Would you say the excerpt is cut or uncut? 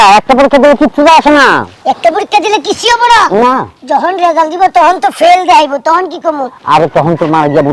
uncut